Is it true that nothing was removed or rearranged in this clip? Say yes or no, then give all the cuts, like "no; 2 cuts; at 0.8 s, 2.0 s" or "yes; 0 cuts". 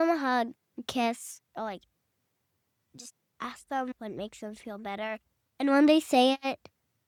yes; 0 cuts